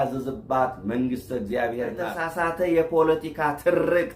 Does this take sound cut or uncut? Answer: cut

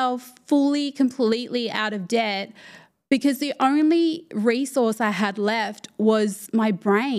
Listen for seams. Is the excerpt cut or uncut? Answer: uncut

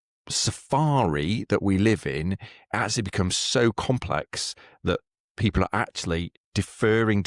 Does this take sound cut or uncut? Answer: uncut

